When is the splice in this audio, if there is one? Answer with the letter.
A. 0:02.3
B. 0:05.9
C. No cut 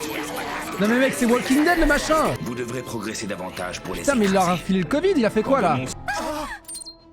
B